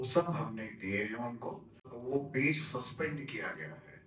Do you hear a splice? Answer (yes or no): yes